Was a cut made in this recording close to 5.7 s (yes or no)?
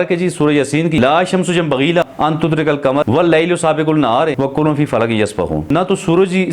yes